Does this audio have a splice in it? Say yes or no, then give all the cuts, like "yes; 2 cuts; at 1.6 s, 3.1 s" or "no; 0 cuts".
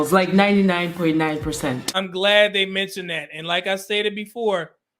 no; 0 cuts